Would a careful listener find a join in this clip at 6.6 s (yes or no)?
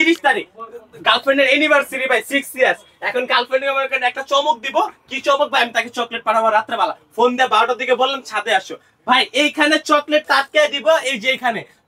no